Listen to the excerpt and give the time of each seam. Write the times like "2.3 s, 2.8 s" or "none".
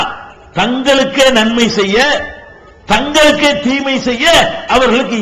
none